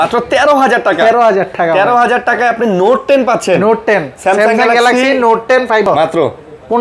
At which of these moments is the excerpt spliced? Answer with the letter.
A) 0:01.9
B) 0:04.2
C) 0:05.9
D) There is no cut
C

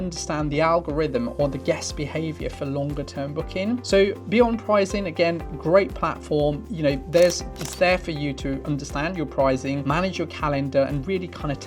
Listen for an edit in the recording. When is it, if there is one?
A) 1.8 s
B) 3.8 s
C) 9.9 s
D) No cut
D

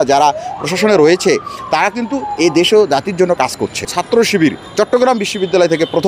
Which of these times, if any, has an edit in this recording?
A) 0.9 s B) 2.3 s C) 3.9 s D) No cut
C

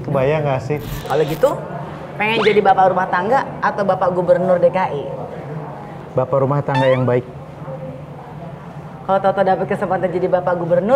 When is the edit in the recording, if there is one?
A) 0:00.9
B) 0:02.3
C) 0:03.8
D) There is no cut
A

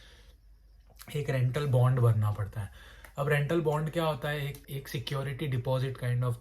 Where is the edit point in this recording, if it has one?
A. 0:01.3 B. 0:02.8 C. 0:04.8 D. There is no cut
C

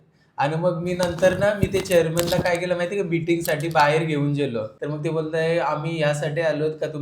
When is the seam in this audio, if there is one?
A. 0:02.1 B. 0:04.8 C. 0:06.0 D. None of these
B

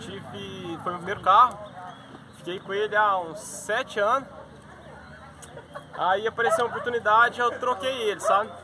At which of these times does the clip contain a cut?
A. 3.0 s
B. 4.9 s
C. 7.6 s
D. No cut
D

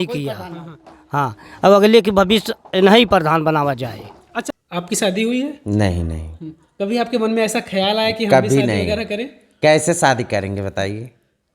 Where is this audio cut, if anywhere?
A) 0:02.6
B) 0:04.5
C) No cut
B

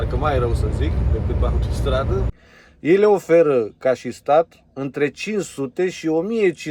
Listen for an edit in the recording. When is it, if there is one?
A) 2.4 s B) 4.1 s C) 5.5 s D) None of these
A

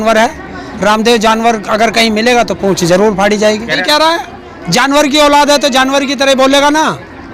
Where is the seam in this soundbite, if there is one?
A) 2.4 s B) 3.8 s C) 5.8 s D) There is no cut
B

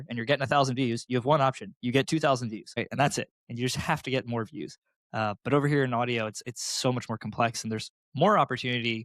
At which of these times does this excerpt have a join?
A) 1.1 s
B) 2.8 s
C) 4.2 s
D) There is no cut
B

